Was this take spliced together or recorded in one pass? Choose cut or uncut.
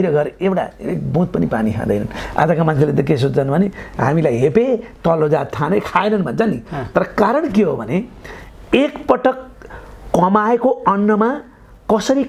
uncut